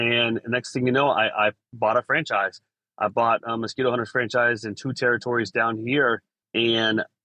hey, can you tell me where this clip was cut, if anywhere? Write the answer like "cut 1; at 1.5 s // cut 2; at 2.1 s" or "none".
cut 1; at 6.4 s